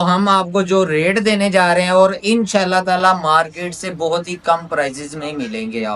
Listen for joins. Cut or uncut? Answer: uncut